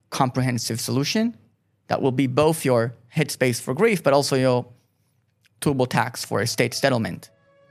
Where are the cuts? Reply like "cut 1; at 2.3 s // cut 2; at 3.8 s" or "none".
none